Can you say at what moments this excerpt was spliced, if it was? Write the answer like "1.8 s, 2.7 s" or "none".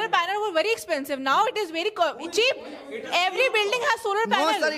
none